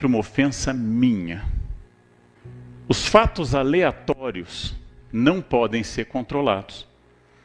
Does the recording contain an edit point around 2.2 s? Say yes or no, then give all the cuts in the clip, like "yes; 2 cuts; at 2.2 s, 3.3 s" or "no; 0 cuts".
yes; 1 cut; at 2.2 s